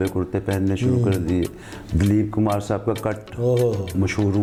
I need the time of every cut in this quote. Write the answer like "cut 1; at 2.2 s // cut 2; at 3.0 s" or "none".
none